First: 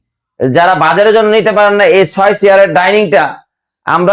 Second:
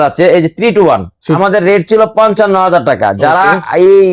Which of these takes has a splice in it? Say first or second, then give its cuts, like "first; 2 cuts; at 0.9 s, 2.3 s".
second; 1 cut; at 1.4 s